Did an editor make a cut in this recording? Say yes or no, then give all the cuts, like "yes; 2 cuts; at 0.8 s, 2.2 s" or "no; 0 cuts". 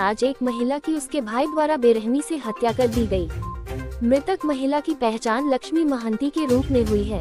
no; 0 cuts